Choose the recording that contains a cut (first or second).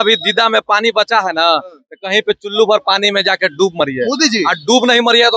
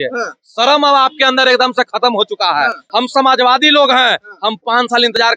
second